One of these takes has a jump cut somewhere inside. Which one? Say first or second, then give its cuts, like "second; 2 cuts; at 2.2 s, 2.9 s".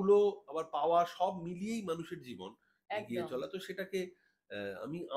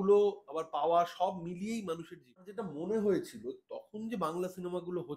second; 1 cut; at 2.6 s